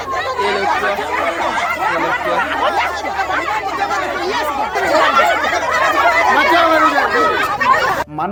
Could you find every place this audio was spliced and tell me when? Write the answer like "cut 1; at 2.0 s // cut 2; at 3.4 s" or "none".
none